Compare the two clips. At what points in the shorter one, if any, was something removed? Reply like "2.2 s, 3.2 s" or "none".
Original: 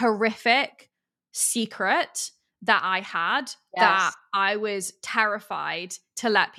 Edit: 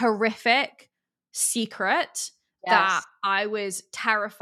2.5 s